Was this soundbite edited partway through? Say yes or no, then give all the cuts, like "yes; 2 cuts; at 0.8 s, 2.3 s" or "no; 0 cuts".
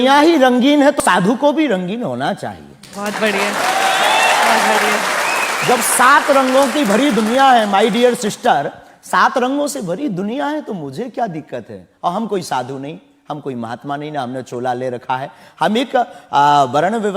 yes; 1 cut; at 1.0 s